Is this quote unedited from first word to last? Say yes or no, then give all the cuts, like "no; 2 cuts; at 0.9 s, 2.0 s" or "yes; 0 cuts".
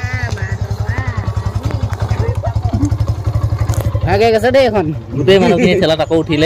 no; 1 cut; at 4.1 s